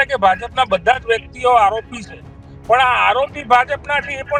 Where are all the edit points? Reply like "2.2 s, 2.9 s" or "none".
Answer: none